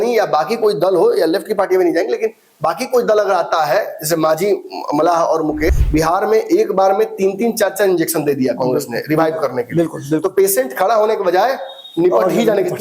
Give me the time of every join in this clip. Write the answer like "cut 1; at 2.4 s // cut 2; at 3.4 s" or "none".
cut 1; at 5.8 s